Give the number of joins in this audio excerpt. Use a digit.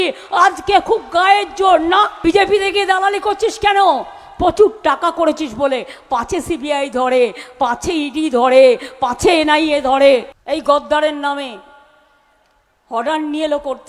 2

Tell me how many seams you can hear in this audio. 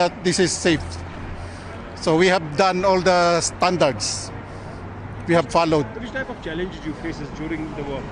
0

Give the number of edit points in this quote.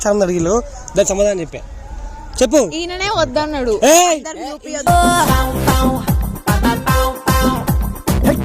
0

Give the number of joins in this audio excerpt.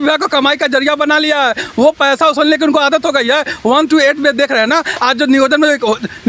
0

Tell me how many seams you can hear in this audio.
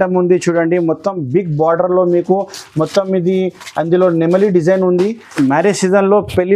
1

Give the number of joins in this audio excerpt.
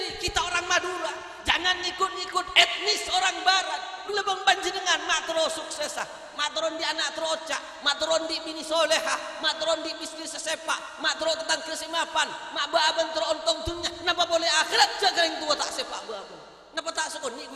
1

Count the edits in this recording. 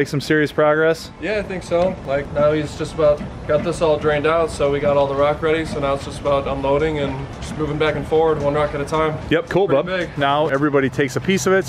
1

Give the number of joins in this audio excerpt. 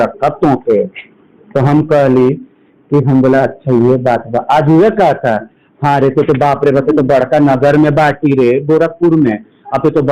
0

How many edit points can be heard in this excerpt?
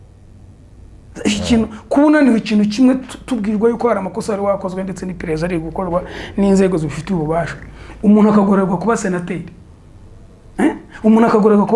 0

